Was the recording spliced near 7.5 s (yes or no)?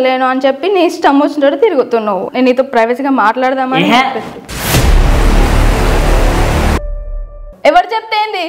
yes